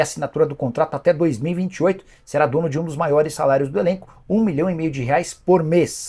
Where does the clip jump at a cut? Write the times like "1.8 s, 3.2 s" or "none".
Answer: none